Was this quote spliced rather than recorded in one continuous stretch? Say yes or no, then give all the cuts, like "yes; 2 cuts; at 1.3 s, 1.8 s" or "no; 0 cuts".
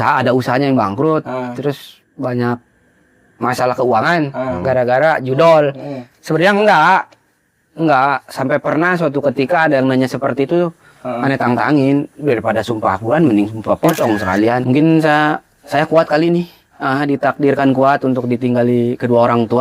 yes; 1 cut; at 14.6 s